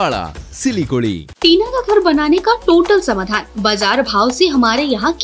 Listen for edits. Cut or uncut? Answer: cut